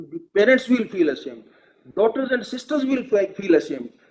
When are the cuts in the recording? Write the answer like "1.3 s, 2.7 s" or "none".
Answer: none